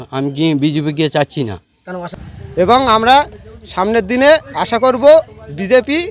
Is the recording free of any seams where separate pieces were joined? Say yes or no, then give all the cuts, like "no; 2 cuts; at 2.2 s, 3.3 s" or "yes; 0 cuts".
no; 1 cut; at 2.1 s